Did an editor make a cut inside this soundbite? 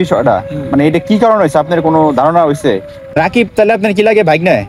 yes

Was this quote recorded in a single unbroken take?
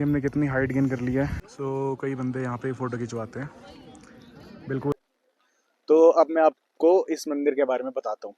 no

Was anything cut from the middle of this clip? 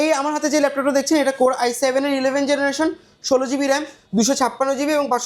no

